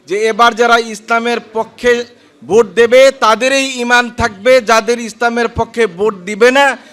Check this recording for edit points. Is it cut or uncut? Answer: uncut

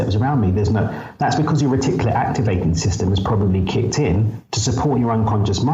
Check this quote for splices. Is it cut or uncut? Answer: uncut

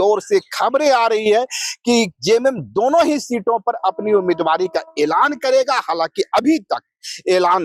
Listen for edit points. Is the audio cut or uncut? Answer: uncut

